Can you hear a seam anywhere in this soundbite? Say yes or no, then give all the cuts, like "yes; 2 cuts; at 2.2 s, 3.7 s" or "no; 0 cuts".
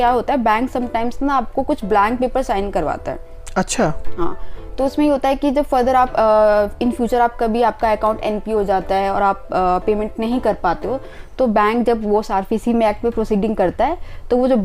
no; 0 cuts